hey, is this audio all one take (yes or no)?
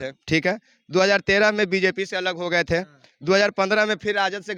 yes